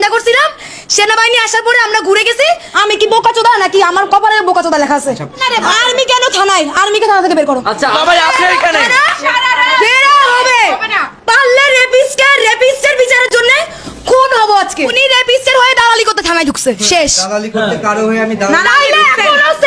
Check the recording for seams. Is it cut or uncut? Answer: cut